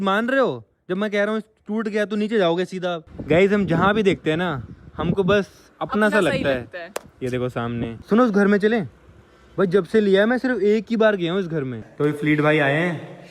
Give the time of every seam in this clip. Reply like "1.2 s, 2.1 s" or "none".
3.1 s, 8.0 s, 11.8 s